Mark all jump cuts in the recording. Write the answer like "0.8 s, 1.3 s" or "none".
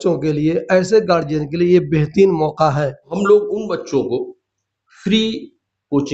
3.1 s

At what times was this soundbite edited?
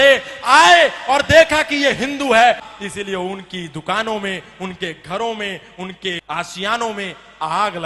2.7 s, 6.2 s

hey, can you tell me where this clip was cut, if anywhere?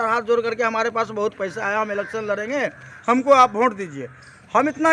none

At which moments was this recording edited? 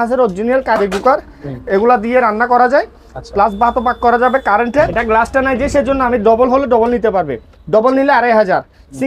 5.0 s

